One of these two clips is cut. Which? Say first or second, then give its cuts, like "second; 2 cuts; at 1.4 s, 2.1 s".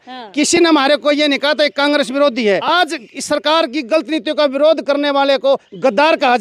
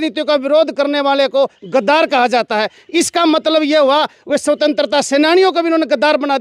first; 1 cut; at 2.6 s